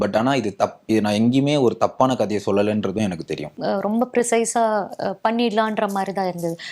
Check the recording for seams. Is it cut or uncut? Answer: cut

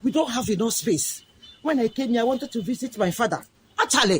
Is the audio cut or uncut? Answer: uncut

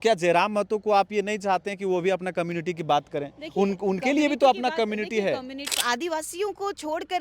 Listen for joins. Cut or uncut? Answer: cut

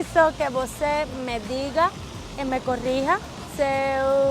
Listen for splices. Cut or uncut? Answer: cut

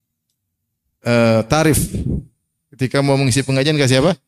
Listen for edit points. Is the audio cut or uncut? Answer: uncut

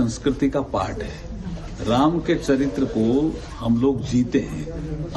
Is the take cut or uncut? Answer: cut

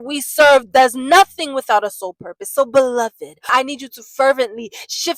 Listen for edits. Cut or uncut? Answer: cut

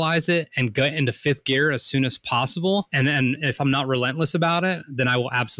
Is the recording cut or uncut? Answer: cut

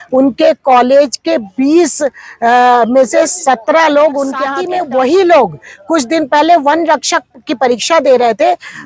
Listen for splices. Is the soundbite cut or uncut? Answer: cut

